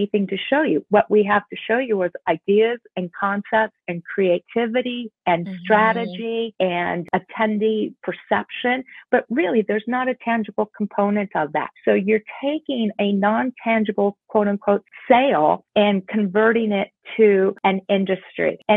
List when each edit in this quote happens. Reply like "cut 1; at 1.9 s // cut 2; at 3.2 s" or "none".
none